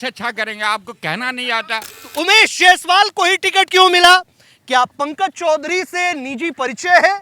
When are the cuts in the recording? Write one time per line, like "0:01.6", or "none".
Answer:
0:02.1

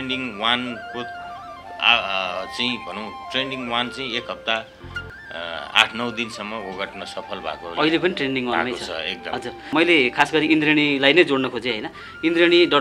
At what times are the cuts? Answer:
0:09.7

